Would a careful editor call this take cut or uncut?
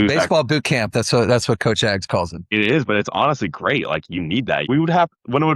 cut